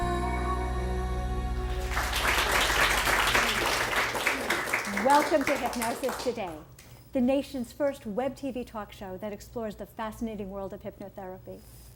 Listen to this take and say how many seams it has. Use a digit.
0